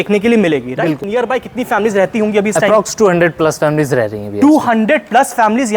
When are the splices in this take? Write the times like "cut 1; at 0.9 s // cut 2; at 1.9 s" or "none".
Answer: cut 1; at 1.0 s